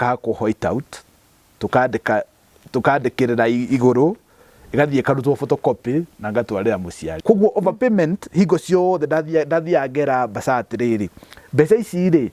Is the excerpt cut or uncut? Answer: cut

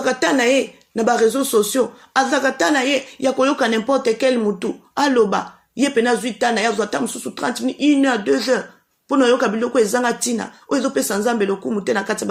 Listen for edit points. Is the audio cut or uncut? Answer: uncut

